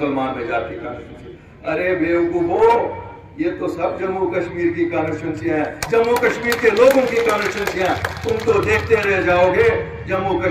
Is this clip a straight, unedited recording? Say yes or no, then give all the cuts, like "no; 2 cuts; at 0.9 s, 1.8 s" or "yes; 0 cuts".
yes; 0 cuts